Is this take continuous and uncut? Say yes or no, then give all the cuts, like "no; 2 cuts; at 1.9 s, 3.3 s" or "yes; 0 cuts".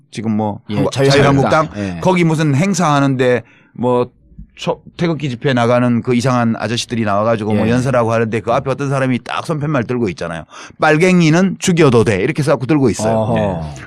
no; 1 cut; at 3.5 s